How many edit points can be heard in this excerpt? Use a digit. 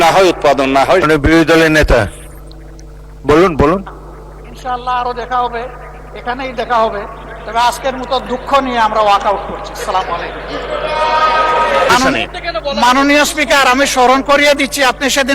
2